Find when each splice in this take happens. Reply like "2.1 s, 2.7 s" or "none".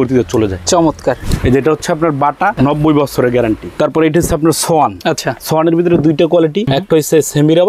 1.2 s, 2.5 s, 3.7 s, 5.1 s, 6.8 s

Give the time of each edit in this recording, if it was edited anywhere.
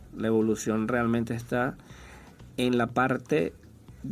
none

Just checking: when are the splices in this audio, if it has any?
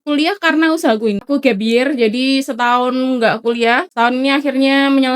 1.2 s, 3.9 s

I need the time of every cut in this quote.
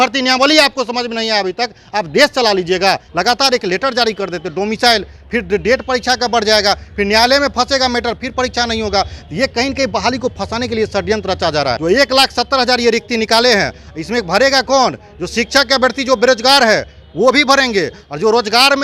3.1 s, 11.8 s

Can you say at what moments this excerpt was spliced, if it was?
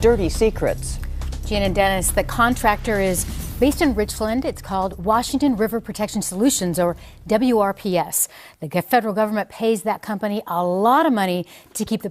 5.6 s

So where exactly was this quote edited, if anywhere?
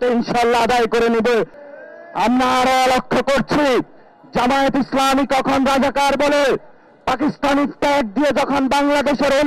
1.6 s

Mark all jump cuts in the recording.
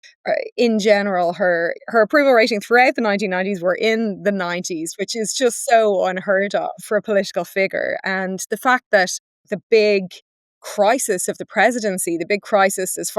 1.8 s

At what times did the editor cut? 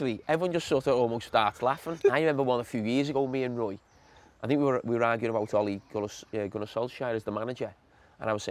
1.9 s

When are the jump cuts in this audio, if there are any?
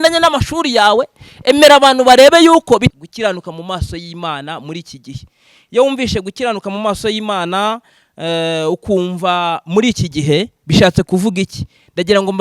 2.9 s

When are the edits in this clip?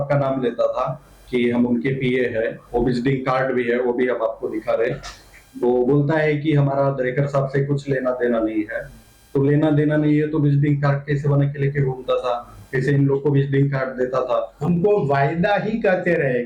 14.5 s

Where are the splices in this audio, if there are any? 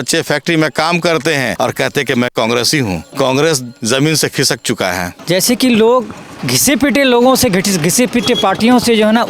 1.5 s, 3.1 s, 5.1 s, 6.5 s

